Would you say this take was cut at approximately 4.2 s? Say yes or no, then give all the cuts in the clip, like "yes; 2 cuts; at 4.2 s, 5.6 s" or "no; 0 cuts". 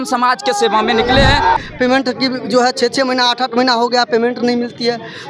no; 1 cut; at 1.6 s